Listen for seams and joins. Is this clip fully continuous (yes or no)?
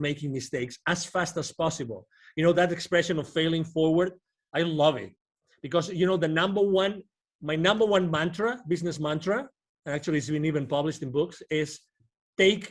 yes